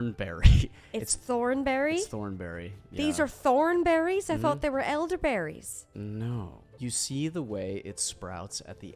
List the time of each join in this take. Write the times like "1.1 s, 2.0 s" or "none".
6.6 s